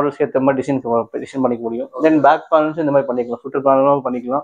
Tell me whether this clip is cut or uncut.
uncut